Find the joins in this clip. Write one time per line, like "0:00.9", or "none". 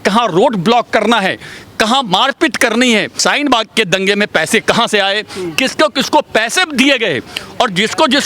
0:03.2

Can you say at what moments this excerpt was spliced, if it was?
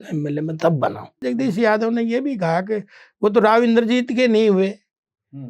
0:01.2

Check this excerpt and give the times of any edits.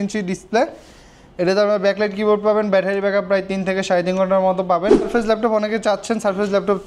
0:05.1

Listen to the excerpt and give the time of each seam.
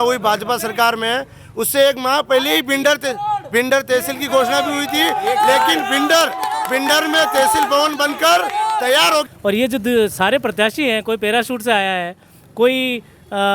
0:09.3

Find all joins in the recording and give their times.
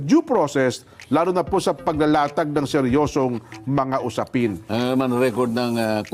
none

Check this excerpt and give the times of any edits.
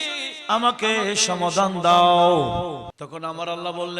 0:02.9

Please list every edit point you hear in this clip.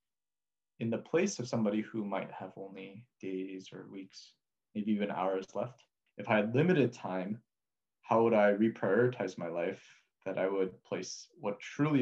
0:06.1

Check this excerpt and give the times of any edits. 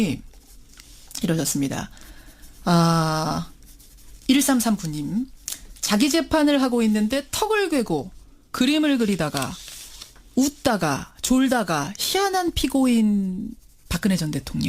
0:03.4

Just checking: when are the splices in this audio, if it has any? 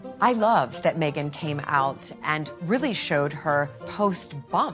0:03.8

